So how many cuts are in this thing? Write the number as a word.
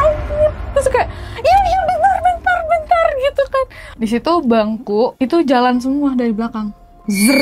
one